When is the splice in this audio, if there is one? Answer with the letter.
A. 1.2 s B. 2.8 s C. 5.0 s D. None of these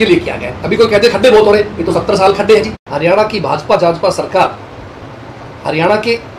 B